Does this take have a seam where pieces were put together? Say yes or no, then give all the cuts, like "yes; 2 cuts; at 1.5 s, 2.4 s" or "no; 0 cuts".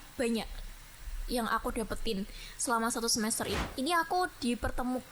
yes; 1 cut; at 3.6 s